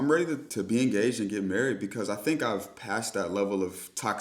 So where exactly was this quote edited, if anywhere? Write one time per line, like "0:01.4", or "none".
none